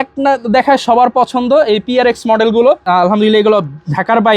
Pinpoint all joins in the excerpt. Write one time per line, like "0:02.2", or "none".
0:02.8